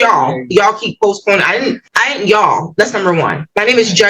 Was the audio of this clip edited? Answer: no; 0 cuts

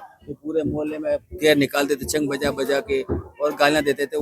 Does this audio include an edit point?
no; 0 cuts

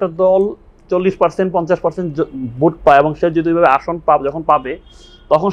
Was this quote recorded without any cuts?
yes; 0 cuts

